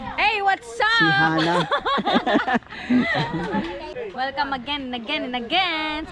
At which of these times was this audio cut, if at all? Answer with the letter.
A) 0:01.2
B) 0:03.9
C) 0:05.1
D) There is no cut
B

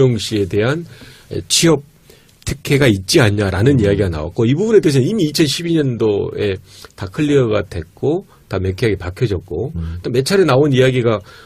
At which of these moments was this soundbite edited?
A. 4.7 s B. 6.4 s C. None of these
A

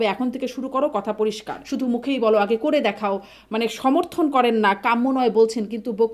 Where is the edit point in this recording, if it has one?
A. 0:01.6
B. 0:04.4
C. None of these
A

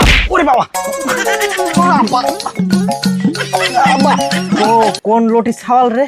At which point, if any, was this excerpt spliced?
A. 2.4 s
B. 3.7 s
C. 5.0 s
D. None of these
D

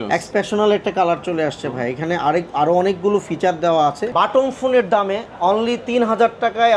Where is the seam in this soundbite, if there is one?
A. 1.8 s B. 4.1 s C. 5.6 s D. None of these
B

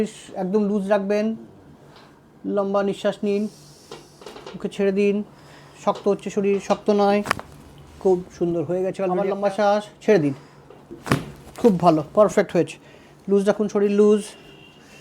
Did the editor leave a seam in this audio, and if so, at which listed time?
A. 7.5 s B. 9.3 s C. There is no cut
B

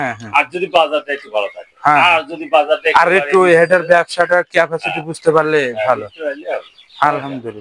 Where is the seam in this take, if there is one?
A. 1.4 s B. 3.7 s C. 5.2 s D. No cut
D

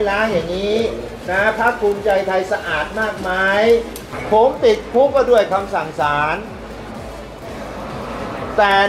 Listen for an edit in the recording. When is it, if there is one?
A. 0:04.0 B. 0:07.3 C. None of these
A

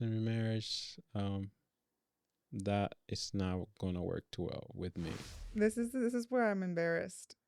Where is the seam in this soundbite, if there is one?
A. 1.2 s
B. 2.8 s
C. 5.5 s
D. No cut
C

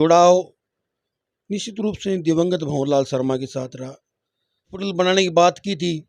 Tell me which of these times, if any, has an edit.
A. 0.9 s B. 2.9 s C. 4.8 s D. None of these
C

